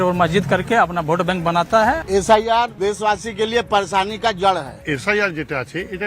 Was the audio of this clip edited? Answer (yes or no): yes